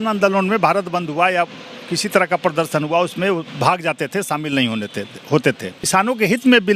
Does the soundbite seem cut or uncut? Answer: cut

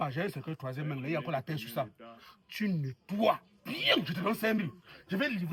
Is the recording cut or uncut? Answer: uncut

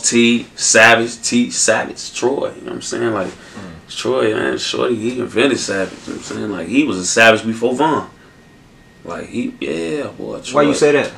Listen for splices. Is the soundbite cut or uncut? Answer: uncut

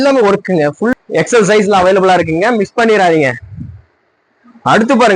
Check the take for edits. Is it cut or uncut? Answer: cut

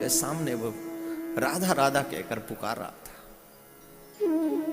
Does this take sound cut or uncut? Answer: uncut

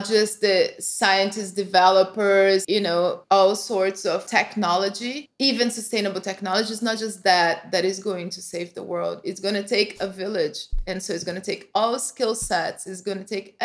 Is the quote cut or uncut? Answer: uncut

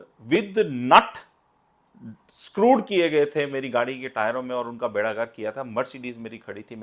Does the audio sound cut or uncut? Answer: uncut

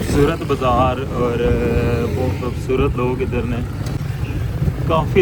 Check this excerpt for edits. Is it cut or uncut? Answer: cut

